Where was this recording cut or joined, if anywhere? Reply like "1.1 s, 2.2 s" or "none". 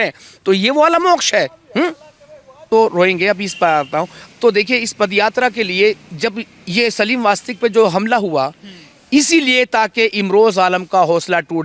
2.7 s